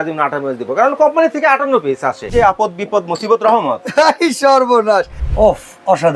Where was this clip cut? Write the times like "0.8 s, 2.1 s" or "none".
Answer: 2.3 s, 5.2 s